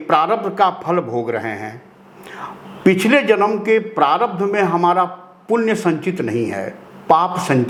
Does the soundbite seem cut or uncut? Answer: uncut